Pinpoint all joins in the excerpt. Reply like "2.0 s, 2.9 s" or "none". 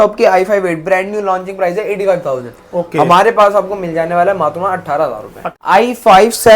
5.4 s